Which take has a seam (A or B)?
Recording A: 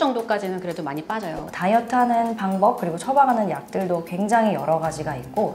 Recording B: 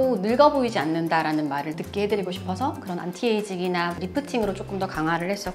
A